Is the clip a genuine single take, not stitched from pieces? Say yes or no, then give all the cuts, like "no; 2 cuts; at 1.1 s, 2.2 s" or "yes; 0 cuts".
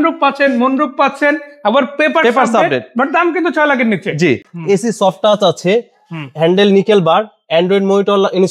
no; 1 cut; at 4.5 s